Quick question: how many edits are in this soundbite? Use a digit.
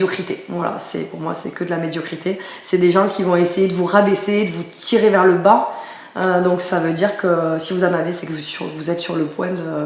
0